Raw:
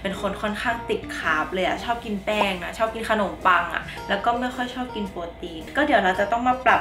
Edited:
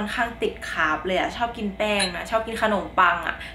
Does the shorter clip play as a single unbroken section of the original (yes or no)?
yes